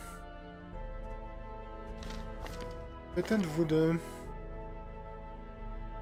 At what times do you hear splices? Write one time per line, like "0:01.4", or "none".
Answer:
none